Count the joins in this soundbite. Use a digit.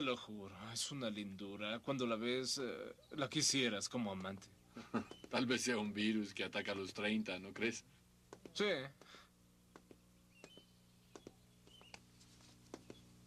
1